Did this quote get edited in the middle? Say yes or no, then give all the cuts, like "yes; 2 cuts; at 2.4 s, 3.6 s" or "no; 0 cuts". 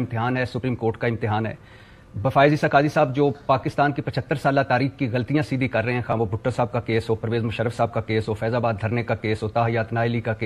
no; 0 cuts